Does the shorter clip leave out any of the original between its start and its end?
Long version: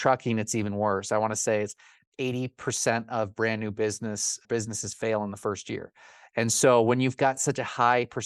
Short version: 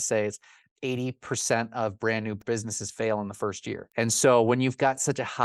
yes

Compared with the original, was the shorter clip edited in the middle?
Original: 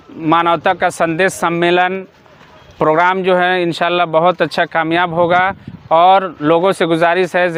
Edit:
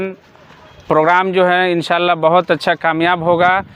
no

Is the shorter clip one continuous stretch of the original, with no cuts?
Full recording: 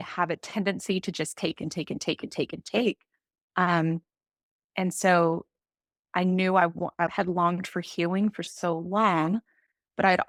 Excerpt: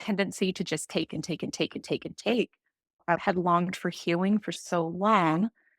no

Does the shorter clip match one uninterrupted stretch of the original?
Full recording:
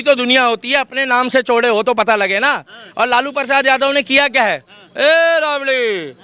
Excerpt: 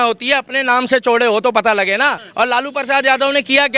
no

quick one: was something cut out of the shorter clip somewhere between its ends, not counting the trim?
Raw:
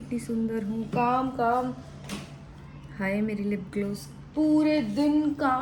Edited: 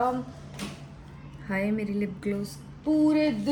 no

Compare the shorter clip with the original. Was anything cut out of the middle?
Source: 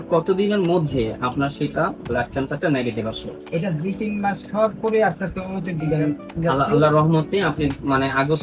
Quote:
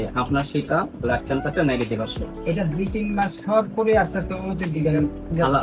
no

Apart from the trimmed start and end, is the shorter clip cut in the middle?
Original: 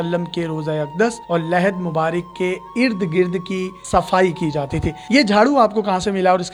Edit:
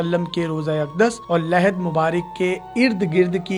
no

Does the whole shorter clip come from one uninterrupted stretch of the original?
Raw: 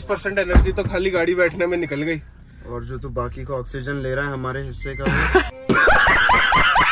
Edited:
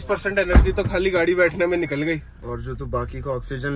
no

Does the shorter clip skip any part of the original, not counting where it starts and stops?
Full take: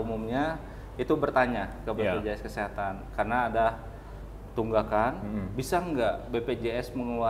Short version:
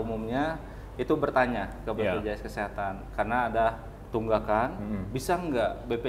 yes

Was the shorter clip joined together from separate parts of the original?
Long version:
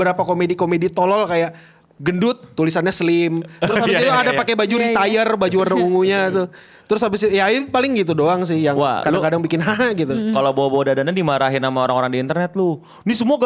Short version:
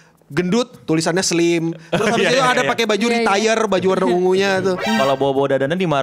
yes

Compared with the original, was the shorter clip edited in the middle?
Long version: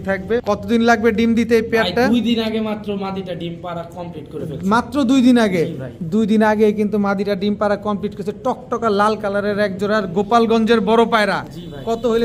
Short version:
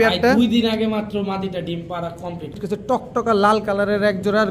yes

